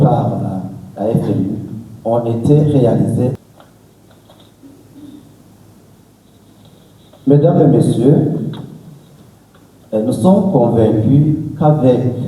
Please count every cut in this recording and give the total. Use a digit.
1